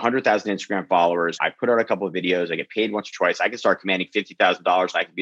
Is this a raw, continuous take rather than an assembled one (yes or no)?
no